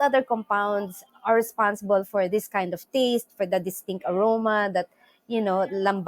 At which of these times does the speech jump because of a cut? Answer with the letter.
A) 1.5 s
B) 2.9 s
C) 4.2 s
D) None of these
D